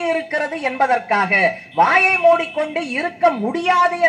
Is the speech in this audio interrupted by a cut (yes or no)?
no